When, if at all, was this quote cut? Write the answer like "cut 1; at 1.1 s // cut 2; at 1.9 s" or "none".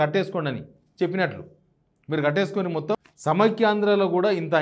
cut 1; at 3.1 s